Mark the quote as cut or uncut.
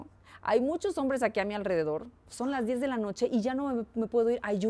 uncut